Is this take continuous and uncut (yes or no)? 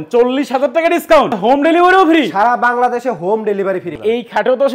no